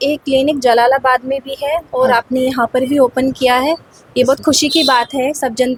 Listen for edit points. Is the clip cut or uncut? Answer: uncut